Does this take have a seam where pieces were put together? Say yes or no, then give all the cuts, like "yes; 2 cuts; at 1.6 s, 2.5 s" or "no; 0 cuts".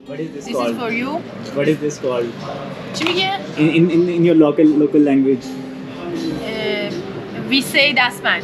no; 0 cuts